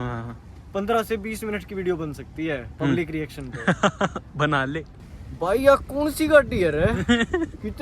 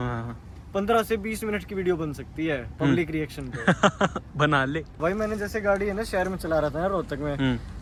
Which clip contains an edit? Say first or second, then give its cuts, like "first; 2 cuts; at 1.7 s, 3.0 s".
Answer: first; 1 cut; at 4.9 s